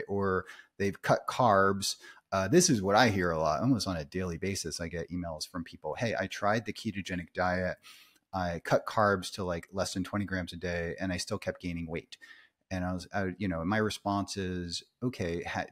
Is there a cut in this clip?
no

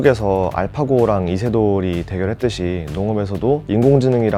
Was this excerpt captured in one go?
yes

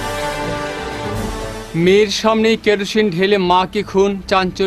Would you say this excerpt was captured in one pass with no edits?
yes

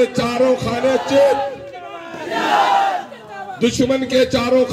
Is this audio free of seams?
yes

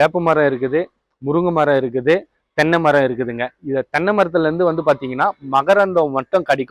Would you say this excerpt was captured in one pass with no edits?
yes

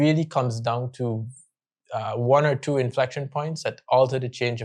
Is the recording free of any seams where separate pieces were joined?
yes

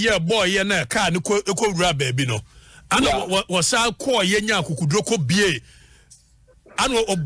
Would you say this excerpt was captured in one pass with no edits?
yes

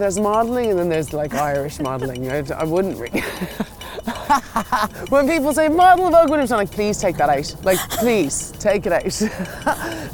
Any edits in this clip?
yes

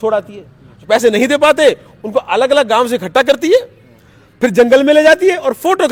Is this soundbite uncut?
yes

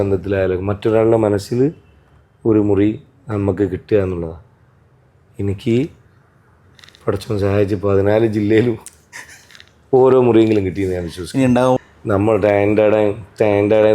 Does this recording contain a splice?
yes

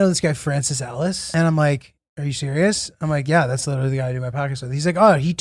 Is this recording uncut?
no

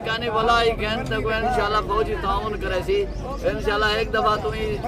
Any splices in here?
no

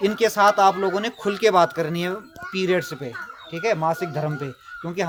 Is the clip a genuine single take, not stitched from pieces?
yes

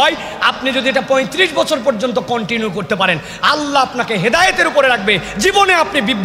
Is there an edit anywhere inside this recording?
no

